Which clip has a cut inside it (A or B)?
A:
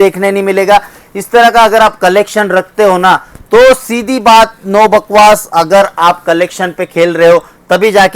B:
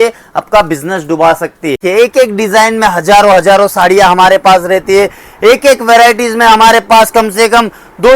B